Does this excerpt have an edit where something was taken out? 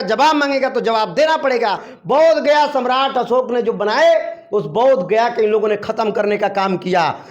yes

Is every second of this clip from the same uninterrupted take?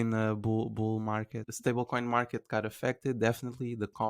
no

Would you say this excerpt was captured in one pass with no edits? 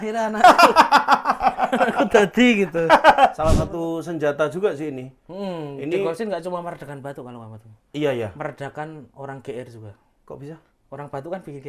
no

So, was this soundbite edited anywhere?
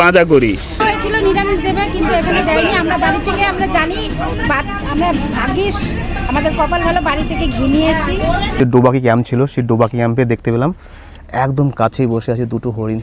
yes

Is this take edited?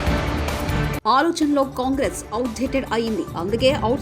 yes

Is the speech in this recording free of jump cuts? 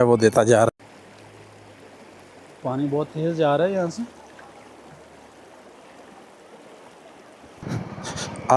no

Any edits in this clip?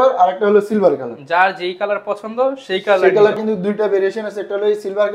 yes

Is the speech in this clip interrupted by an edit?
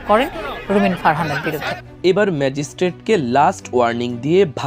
yes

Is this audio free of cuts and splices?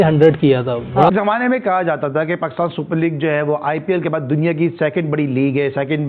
no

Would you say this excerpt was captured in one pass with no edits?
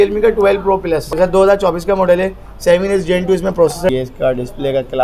no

